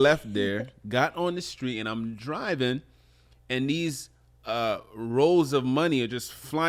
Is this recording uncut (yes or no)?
yes